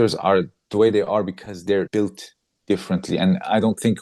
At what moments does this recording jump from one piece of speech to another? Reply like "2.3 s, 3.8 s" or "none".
1.9 s